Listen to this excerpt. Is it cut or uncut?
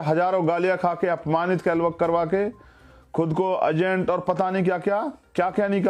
uncut